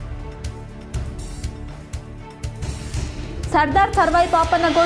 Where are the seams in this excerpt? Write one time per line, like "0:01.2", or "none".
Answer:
none